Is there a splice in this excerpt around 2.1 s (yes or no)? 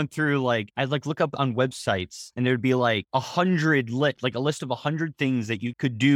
no